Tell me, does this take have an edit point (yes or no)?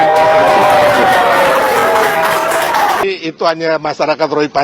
yes